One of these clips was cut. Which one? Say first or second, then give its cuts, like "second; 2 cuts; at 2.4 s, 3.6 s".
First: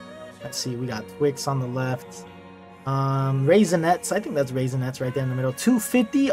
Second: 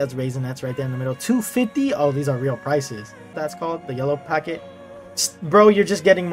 second; 1 cut; at 3.4 s